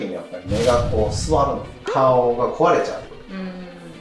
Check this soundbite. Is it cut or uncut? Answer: cut